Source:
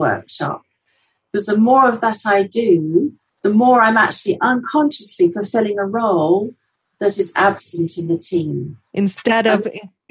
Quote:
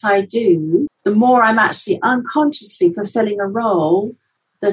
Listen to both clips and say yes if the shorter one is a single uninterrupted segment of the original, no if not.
no